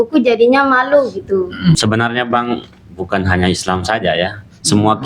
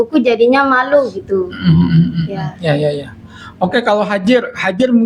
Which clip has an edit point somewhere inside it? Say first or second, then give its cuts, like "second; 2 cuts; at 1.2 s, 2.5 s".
first; 1 cut; at 1.8 s